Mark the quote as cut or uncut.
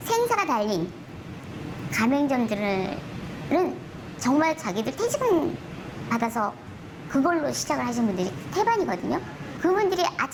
uncut